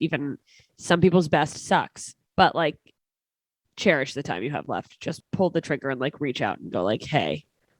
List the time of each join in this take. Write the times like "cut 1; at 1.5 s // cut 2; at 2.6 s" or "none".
cut 1; at 5.2 s